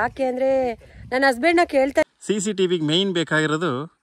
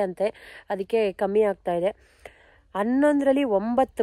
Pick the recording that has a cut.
first; 1 cut; at 2.1 s

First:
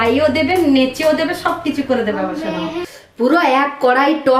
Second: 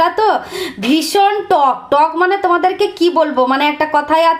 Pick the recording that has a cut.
first; 1 cut; at 2.8 s

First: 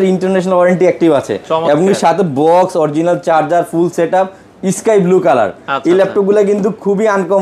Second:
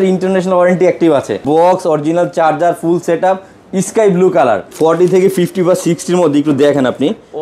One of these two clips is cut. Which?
second; 2 cuts; at 1.4 s, 4.7 s

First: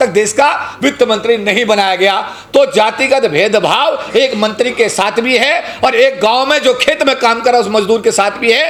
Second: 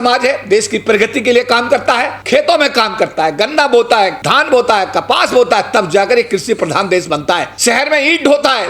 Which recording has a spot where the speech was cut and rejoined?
second; 3 cuts; at 2.1 s, 4.2 s, 7.5 s

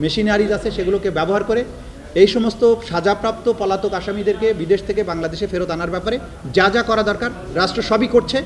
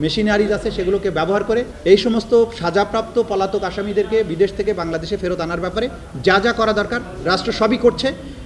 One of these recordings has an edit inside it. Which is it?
second; 1 cut; at 1.7 s

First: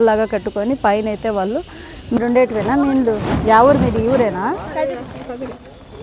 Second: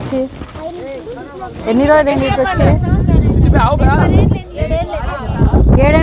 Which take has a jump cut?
first; 1 cut; at 2.2 s

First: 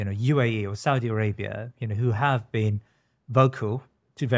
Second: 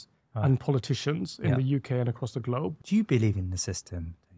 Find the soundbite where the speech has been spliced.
second; 1 cut; at 2.8 s

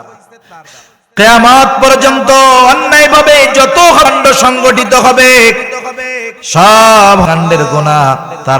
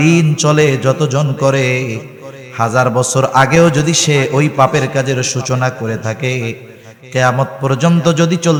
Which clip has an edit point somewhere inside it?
first; 2 cuts; at 4.1 s, 7.3 s

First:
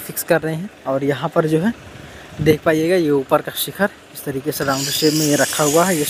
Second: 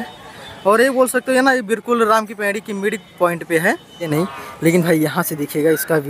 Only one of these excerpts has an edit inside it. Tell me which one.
second; 1 cut; at 4.1 s

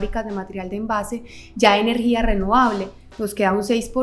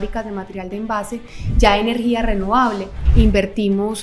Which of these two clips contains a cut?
second; 1 cut; at 2.9 s

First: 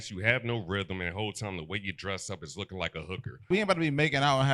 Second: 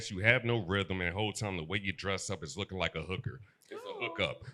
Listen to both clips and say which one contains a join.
first; 1 cut; at 3.5 s

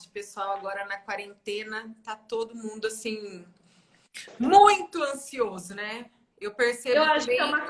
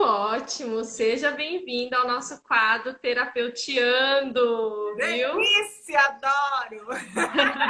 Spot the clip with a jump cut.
second; 1 cut; at 5.3 s

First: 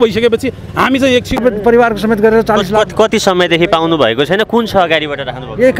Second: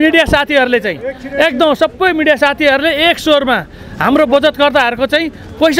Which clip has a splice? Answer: first; 1 cut; at 1.4 s

